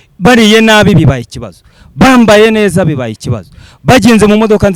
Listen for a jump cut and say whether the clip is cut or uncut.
uncut